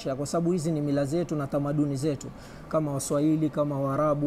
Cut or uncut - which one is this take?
uncut